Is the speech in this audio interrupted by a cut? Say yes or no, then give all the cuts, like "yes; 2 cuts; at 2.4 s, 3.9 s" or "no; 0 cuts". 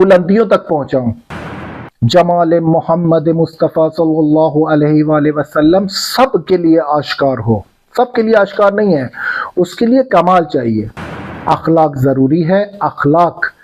yes; 2 cuts; at 1.8 s, 11.0 s